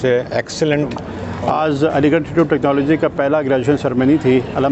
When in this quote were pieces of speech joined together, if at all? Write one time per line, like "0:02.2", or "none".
0:01.3